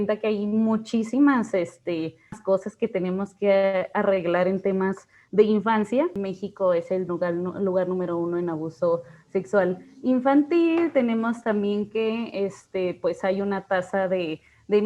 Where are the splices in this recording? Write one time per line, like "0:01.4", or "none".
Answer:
0:02.4
0:06.3